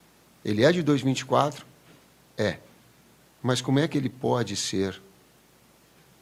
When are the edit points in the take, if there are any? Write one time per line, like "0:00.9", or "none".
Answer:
none